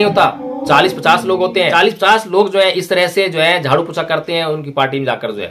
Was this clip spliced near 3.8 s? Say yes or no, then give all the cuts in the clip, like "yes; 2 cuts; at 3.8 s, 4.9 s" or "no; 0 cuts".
no; 1 cut; at 1.7 s